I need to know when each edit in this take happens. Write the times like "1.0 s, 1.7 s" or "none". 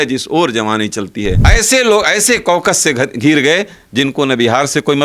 1.4 s